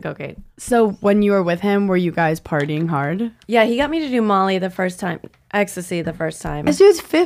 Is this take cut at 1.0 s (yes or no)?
no